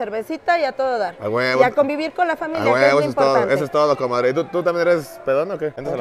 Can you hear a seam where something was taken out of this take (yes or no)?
no